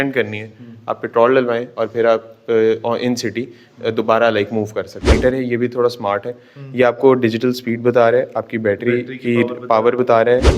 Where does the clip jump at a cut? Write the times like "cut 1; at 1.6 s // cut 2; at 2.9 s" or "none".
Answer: cut 1; at 5.1 s